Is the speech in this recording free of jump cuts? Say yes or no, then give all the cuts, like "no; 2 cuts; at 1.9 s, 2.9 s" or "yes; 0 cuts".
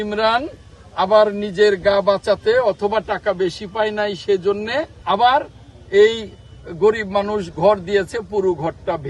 no; 1 cut; at 4.9 s